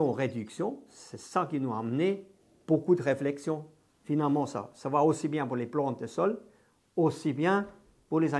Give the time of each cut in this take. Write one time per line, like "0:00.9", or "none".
none